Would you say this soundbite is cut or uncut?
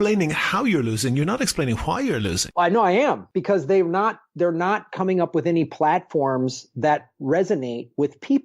cut